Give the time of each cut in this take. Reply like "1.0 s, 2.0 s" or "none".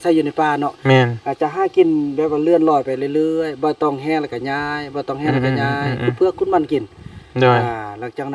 none